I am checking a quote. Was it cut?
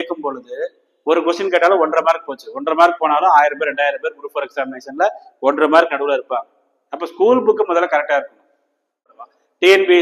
yes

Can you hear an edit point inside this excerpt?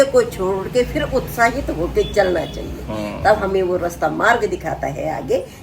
no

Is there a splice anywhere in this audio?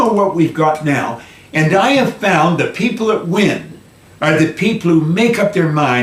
no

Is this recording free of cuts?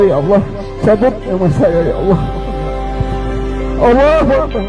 yes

